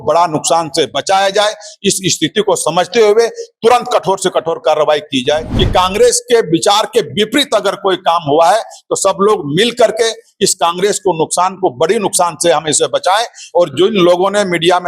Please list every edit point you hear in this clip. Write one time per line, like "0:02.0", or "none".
0:05.5